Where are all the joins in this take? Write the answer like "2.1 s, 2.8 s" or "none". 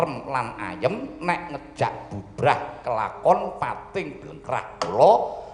none